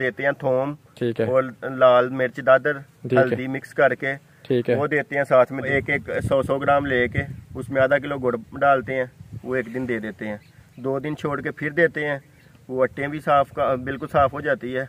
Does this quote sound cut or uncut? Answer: cut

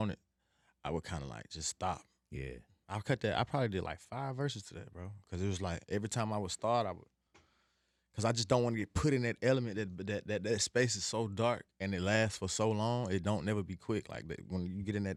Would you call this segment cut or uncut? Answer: uncut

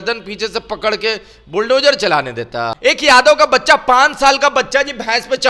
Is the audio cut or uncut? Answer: cut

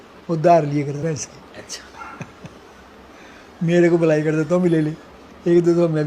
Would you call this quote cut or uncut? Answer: cut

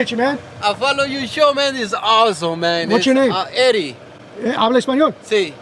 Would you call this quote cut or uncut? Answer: uncut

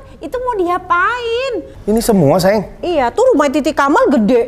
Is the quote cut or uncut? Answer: cut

